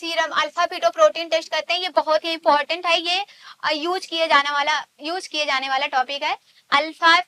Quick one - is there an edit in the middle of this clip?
no; 0 cuts

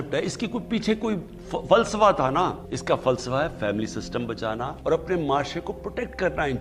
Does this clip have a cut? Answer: yes; 2 cuts; at 2.7 s, 4.7 s

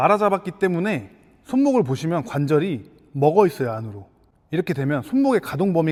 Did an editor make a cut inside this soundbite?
no; 0 cuts

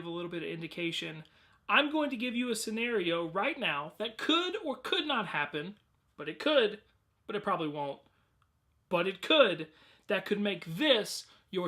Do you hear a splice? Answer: yes; 1 cut; at 10.7 s

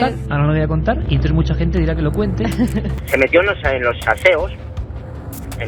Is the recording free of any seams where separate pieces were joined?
no; 1 cut; at 3.0 s

